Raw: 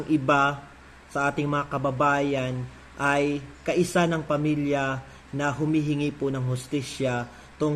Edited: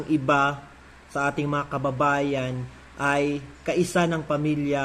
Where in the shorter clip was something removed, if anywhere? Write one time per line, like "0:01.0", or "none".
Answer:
none